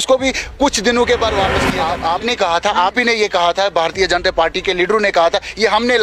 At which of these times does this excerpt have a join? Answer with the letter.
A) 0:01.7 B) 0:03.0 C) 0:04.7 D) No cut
A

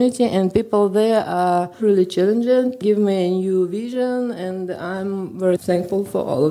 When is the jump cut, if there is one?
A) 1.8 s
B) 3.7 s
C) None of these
A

